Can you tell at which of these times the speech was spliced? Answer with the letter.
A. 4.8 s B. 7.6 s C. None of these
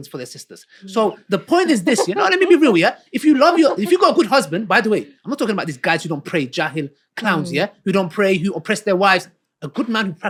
C